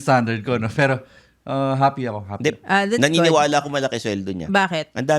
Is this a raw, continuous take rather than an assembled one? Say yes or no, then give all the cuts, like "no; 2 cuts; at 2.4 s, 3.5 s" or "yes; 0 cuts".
yes; 0 cuts